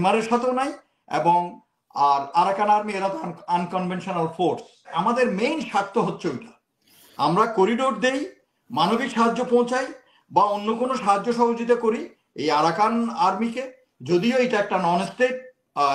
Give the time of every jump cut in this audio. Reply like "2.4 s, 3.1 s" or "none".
4.9 s